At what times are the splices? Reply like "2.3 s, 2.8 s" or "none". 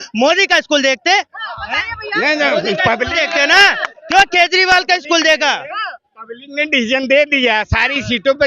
none